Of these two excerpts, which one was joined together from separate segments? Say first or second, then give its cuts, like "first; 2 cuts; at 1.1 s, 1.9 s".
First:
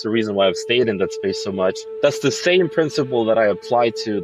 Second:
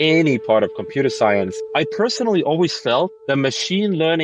second; 1 cut; at 3.2 s